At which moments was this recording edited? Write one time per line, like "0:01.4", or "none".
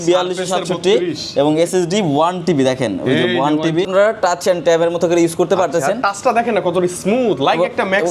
0:03.9